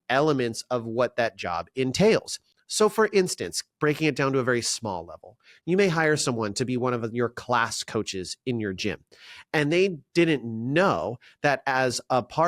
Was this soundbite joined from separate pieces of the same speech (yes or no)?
no